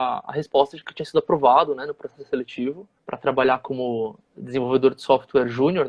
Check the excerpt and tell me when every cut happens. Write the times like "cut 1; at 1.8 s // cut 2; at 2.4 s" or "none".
none